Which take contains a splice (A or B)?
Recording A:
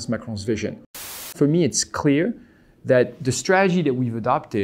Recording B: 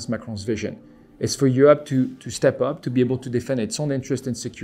A